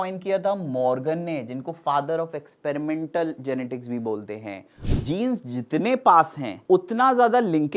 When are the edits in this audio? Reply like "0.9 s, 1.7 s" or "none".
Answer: 4.9 s, 6.5 s